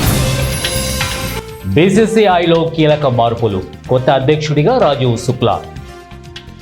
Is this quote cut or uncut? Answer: cut